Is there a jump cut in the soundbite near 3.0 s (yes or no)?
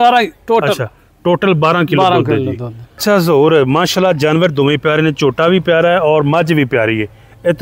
yes